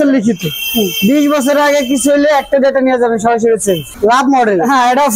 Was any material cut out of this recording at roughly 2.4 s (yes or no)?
no